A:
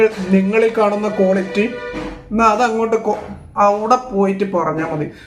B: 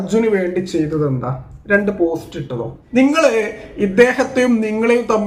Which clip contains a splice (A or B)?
B